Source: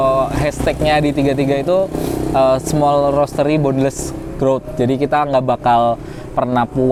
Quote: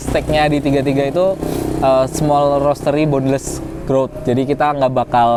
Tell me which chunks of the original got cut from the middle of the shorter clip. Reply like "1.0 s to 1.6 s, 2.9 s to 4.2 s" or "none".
none

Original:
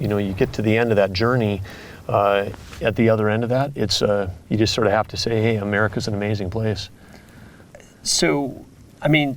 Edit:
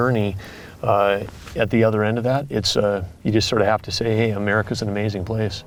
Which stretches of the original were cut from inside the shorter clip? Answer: none

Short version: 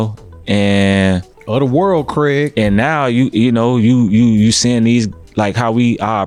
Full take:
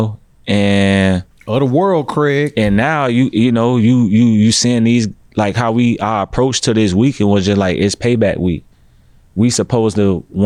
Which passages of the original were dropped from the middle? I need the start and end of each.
none

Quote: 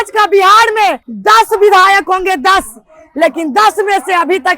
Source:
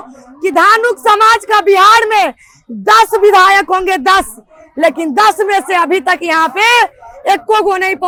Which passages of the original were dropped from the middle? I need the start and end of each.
2.4 s to 2.7 s

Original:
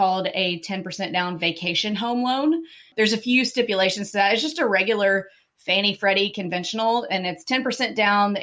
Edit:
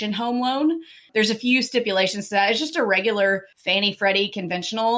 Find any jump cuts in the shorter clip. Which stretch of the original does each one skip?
5.4 s to 5.6 s

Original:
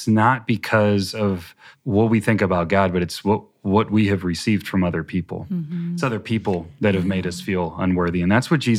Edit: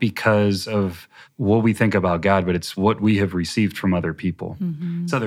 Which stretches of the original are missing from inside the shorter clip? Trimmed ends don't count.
3.1 s to 3.6 s

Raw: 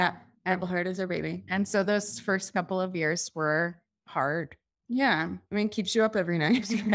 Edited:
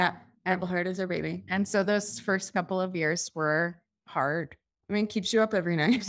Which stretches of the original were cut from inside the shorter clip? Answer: 4.8 s to 5.4 s

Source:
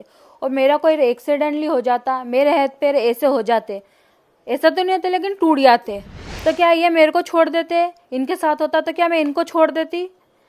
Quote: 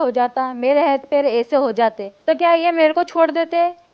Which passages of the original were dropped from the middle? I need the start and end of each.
3.8 s to 6.3 s

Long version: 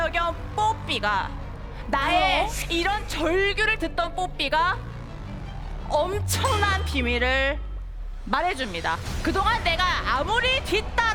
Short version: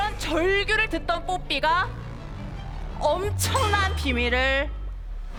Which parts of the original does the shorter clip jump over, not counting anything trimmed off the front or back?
none

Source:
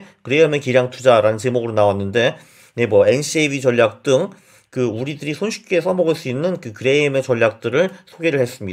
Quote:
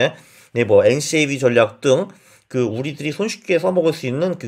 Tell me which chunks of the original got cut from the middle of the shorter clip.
none

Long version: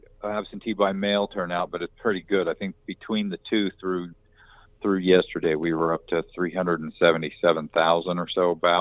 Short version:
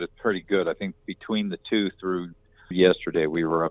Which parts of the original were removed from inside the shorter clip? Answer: 4.5 s to 5.0 s

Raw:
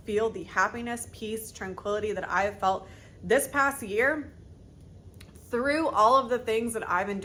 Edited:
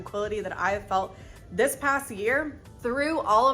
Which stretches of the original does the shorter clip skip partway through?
4.4 s to 5.3 s

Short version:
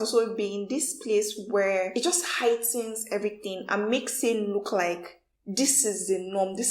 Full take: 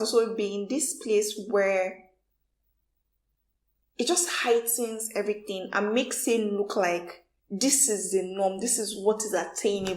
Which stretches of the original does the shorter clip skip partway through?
1.9 s to 3.9 s

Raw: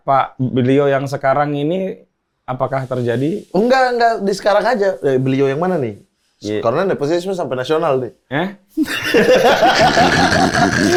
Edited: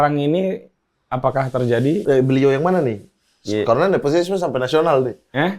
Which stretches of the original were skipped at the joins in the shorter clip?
3.4 s to 5.0 s

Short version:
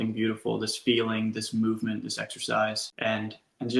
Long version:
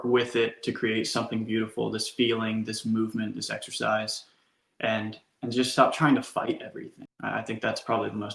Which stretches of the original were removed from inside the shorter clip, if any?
4.2 s to 4.7 s

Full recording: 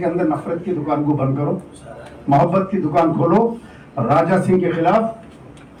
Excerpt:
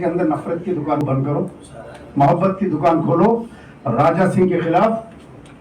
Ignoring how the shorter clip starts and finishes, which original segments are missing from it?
1.0 s to 1.1 s

